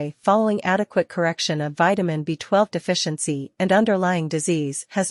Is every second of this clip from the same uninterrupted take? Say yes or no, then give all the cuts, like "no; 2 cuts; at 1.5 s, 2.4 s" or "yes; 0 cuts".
yes; 0 cuts